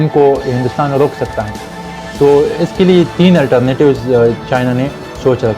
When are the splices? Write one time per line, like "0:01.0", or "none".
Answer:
none